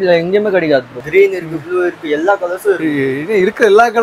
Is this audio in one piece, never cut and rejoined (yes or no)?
no